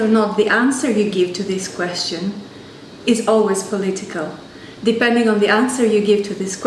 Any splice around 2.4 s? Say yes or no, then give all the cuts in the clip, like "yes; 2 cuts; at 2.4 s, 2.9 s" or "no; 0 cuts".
no; 1 cut; at 4.3 s